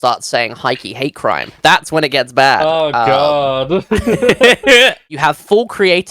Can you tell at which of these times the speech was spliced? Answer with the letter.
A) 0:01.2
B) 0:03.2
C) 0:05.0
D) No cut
C